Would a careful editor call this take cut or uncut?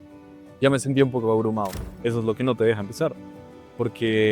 cut